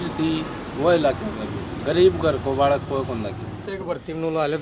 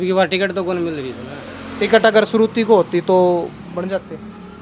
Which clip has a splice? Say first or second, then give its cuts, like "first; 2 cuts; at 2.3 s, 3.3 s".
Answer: first; 2 cuts; at 1.7 s, 3.7 s